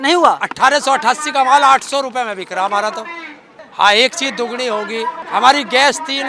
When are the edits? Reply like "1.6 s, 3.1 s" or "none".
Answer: 3.6 s, 5.2 s